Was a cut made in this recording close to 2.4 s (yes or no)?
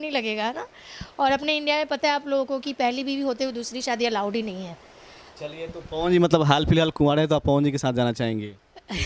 no